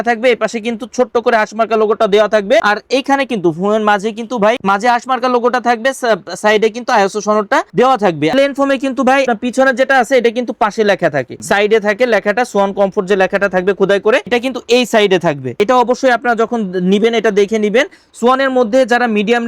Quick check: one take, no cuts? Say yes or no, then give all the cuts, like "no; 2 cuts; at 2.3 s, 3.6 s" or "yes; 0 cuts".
yes; 0 cuts